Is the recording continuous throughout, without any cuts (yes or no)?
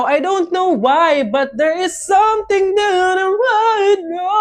yes